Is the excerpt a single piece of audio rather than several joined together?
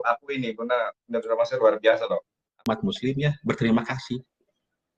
no; 1 cut; at 2.6 s

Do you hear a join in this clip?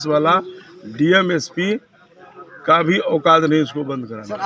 no; 0 cuts

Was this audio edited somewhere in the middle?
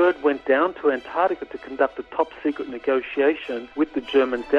yes; 1 cut; at 3.6 s

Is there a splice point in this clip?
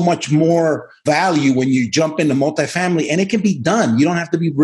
yes; 1 cut; at 1.0 s

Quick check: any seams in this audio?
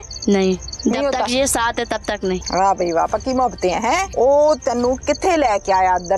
yes; 2 cuts; at 2.4 s, 4.1 s

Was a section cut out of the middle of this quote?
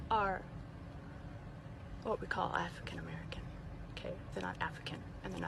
no; 0 cuts

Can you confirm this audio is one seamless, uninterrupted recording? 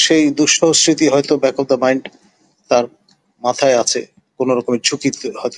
yes; 0 cuts

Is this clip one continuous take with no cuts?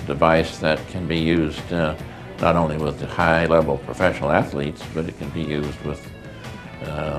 yes; 0 cuts

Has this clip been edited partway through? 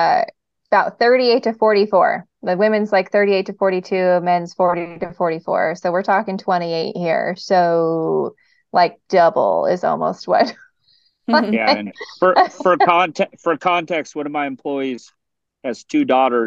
no; 0 cuts

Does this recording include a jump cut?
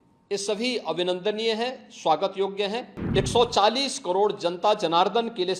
yes; 1 cut; at 3.0 s

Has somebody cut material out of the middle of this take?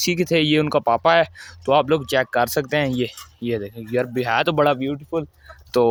no; 0 cuts

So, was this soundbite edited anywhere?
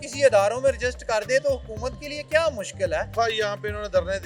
yes; 1 cut; at 3.1 s

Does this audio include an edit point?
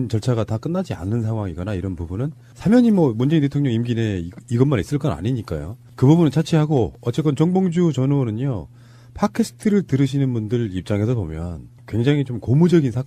no; 0 cuts

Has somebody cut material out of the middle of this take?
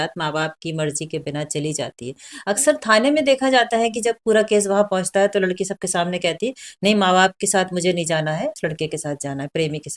yes; 1 cut; at 8.6 s

